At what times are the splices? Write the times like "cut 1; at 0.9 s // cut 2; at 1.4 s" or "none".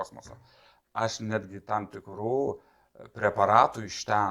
none